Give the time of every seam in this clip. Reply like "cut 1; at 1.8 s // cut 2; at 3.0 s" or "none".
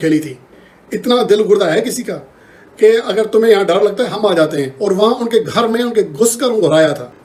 none